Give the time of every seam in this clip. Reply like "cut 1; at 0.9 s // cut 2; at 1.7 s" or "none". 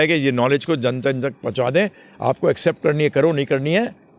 none